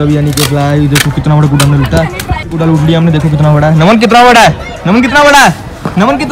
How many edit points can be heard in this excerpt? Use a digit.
0